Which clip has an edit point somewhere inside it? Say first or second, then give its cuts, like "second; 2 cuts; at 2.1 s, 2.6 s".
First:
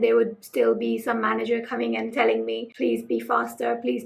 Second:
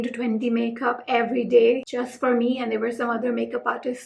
first; 1 cut; at 2.7 s